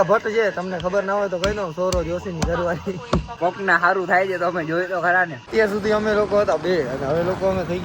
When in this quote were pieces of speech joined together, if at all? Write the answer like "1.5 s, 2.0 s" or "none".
3.3 s, 5.4 s